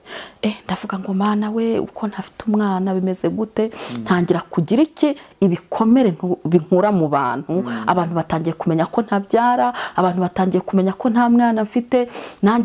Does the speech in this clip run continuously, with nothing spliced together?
yes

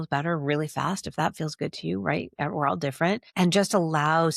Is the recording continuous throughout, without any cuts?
yes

